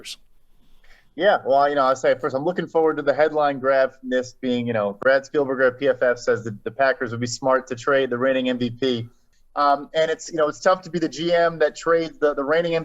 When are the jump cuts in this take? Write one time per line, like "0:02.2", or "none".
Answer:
0:09.2

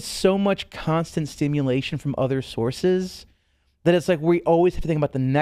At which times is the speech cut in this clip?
none

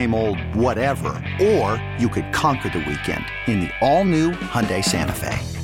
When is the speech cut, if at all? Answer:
none

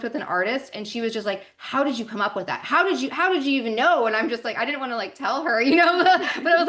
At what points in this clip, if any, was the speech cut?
none

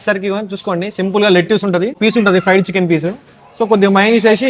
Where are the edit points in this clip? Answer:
0:01.9

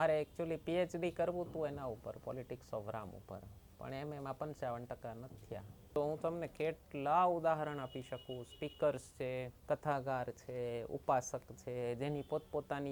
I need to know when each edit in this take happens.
0:06.0
0:09.5

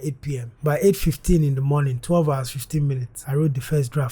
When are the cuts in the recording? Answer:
0:03.1

